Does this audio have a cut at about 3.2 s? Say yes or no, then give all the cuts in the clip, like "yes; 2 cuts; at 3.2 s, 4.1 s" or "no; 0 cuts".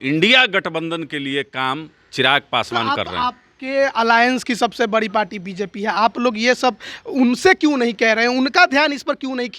no; 0 cuts